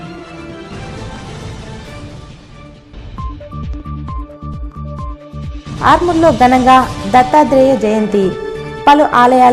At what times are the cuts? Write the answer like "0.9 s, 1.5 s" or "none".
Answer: 1.0 s, 3.0 s, 5.1 s